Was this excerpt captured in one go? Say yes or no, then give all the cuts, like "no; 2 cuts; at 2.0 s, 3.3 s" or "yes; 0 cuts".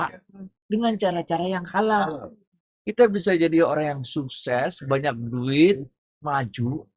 yes; 0 cuts